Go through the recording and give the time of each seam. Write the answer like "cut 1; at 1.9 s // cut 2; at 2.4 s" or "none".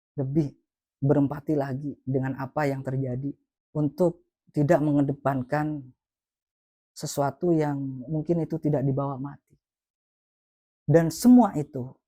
cut 1; at 3.5 s